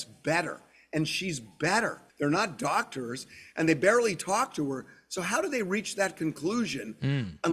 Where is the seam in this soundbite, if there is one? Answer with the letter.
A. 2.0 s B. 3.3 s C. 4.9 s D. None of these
A